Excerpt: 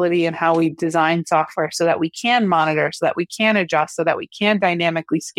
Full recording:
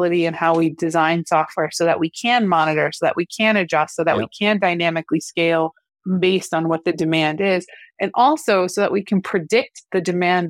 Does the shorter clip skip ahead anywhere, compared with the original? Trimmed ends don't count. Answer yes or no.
no